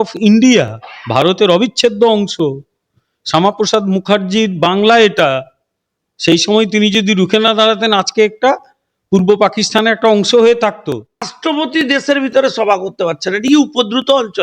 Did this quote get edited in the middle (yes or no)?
yes